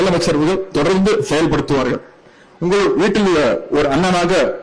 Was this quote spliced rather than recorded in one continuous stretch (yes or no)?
no